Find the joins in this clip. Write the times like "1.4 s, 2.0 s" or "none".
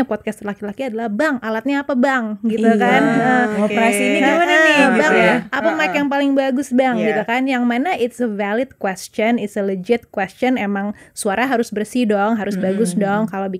none